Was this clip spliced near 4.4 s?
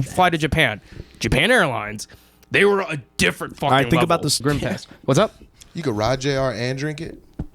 yes; 1 cut; at 4.4 s

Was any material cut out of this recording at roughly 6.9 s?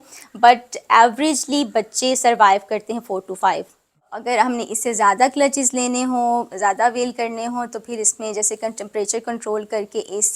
no; 1 cut; at 4.1 s

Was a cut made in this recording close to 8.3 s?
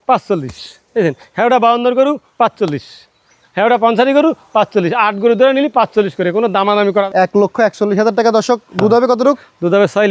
no; 1 cut; at 7.1 s

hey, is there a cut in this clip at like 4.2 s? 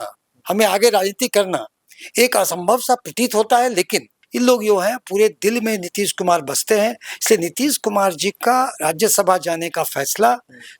yes; 1 cut; at 4.2 s

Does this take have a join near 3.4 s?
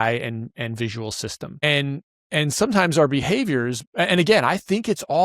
no; 1 cut; at 1.6 s

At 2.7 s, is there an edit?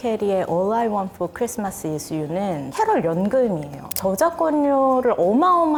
no; 0 cuts

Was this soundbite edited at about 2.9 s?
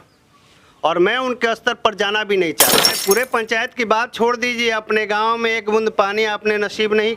yes; 1 cut; at 2.9 s

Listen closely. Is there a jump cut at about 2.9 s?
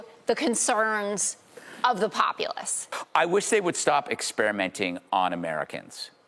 yes; 1 cut; at 2.9 s

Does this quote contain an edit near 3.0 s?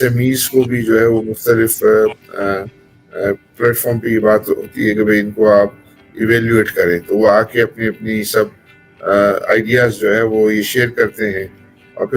no; 0 cuts

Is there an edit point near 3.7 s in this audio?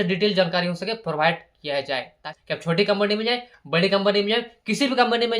no; 1 cut; at 2.2 s

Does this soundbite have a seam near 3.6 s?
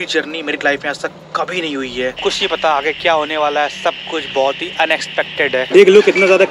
no; 2 cuts; at 2.2 s, 5.7 s

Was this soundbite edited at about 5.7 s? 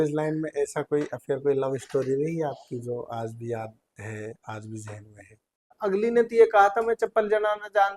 yes; 1 cut; at 5.7 s

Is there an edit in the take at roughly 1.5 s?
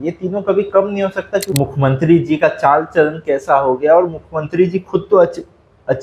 yes; 1 cut; at 1.5 s

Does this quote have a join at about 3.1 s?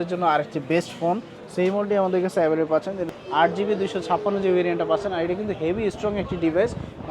yes; 1 cut; at 3.1 s

